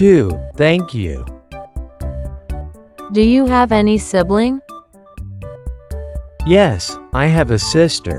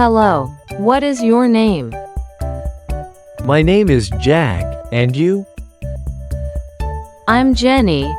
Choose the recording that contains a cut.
second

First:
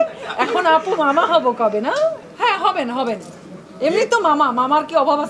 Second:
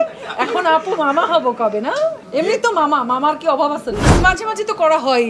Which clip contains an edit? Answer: second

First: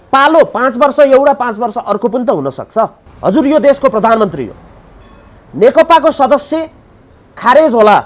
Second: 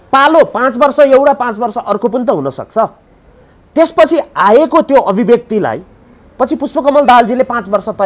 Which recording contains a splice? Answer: first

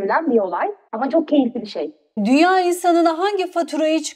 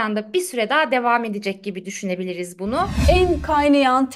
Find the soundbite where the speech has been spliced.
second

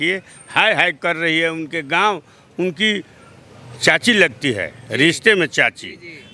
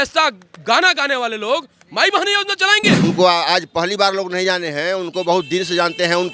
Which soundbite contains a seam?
second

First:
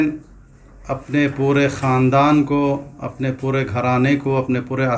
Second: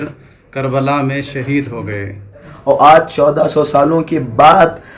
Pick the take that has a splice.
second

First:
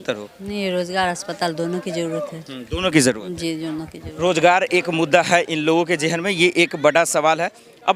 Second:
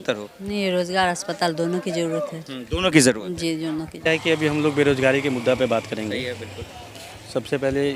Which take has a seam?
second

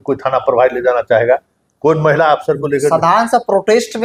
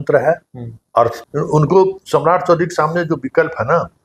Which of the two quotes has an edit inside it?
second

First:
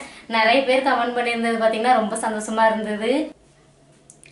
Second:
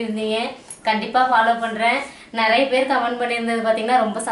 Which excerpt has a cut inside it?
first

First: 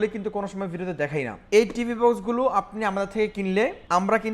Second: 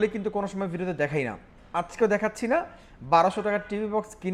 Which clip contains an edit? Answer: first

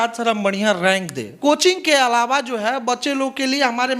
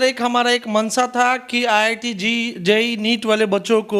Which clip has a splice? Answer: first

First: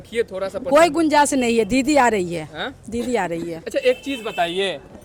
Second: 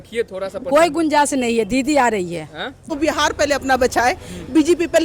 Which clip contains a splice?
second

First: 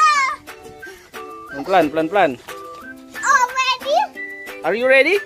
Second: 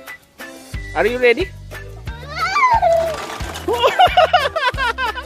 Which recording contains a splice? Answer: second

